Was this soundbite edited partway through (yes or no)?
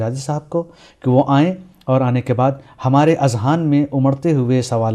no